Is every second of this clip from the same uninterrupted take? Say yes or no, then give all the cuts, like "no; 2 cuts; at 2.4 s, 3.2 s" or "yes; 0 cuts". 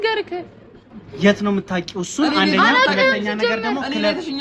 yes; 0 cuts